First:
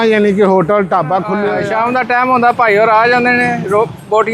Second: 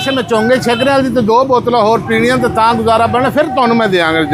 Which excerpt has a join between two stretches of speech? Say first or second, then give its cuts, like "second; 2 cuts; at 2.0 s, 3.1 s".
first; 1 cut; at 1.4 s